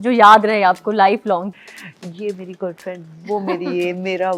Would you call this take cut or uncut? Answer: cut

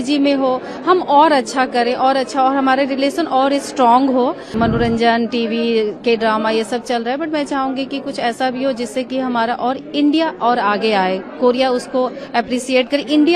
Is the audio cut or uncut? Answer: cut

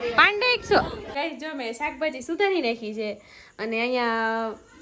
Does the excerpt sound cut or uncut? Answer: cut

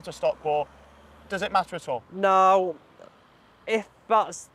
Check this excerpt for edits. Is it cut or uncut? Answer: uncut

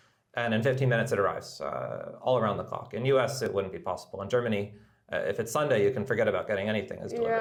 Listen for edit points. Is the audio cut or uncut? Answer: uncut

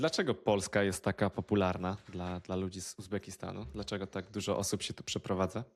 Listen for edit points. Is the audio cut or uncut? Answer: uncut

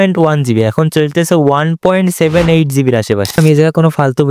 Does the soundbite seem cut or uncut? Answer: cut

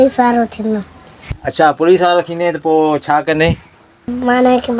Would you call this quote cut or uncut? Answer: uncut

